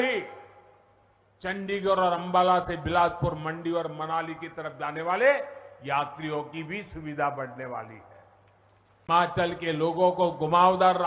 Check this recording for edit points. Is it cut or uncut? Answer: cut